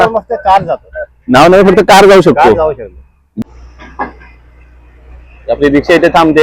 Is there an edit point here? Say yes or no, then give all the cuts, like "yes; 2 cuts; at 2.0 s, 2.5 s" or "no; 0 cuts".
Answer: yes; 1 cut; at 3.4 s